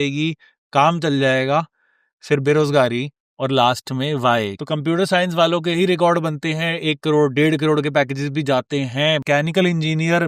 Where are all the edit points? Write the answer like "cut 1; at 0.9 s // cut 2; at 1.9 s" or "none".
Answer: cut 1; at 4.6 s // cut 2; at 9.2 s